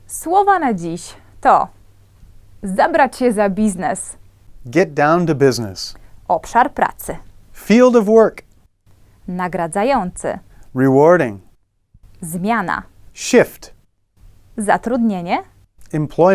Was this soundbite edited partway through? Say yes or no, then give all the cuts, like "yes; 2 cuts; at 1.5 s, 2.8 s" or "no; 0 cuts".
no; 0 cuts